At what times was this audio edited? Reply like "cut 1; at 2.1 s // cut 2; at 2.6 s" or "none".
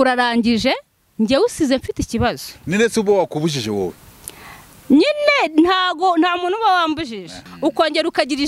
cut 1; at 7.4 s